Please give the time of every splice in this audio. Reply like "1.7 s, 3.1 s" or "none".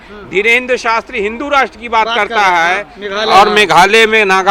3.0 s